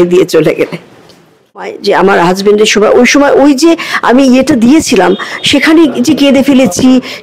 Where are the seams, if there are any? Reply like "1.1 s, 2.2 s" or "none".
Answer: 1.8 s